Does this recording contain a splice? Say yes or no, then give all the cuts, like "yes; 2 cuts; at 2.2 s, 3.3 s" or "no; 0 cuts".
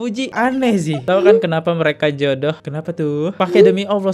yes; 1 cut; at 1.0 s